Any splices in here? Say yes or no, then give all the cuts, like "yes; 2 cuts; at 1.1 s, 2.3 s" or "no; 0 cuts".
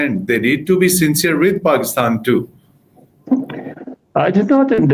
no; 0 cuts